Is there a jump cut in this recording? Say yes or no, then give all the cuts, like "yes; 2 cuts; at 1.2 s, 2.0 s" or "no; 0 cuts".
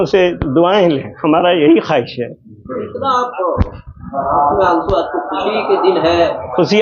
no; 0 cuts